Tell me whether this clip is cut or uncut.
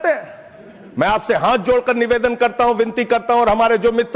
uncut